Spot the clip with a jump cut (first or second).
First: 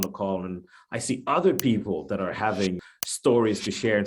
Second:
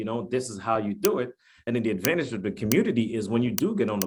first